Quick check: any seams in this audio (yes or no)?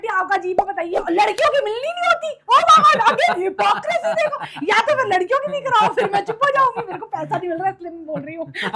yes